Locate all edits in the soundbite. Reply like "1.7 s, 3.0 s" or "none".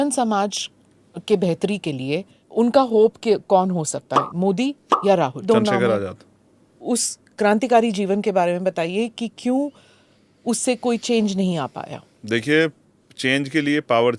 2.4 s, 5.4 s, 6.8 s